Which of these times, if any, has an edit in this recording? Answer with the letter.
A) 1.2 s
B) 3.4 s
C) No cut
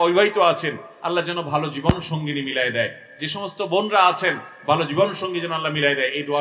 C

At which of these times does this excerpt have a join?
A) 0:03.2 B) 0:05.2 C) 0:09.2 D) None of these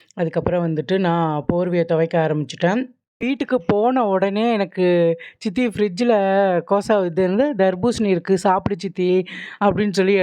A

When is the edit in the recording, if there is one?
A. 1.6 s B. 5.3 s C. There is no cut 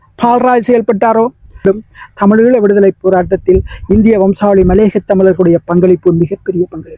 A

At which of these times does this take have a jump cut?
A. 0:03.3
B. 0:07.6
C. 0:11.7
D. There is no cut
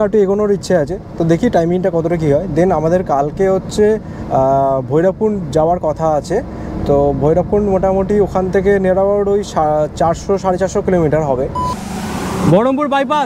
C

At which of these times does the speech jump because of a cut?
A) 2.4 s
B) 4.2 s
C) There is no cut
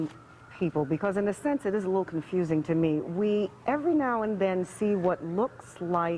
B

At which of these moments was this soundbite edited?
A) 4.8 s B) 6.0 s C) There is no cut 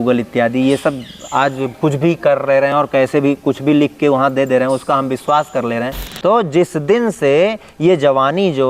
B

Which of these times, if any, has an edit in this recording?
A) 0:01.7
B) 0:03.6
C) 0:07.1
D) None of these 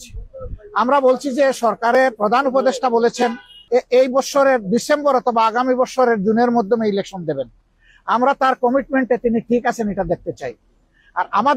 B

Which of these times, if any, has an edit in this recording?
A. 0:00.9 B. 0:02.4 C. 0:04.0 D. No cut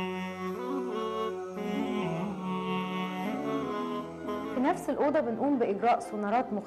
D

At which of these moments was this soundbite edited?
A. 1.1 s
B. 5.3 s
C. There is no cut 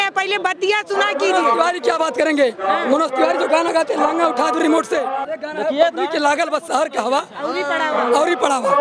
B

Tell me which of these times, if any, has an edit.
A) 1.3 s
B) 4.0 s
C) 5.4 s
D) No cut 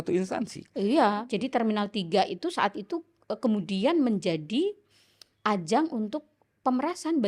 A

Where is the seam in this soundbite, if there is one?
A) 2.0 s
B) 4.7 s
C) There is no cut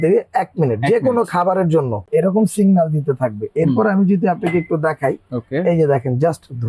A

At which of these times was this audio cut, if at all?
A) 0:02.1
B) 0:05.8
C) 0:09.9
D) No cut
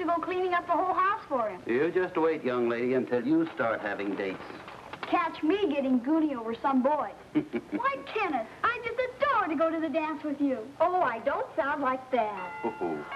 A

